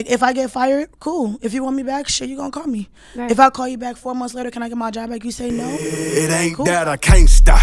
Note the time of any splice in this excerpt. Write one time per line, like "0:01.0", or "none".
0:05.8